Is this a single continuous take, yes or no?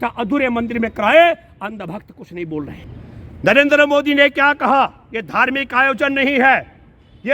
no